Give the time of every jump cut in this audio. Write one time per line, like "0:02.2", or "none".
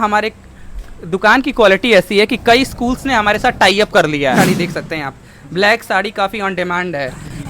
0:04.4